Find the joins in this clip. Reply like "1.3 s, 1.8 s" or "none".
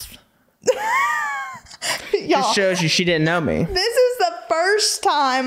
none